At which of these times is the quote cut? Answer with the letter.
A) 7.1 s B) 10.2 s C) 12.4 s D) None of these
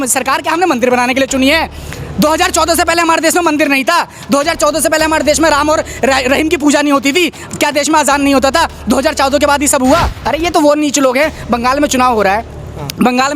B